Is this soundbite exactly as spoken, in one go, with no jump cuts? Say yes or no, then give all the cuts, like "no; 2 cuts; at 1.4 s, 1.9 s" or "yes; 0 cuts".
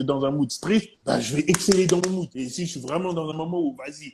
no; 2 cuts; at 0.9 s, 2.3 s